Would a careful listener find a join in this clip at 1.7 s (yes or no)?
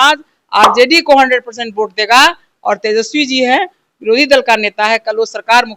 no